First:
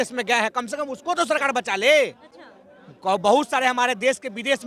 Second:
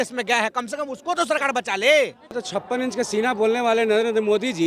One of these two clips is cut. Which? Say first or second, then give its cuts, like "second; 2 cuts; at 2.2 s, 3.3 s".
second; 1 cut; at 2.4 s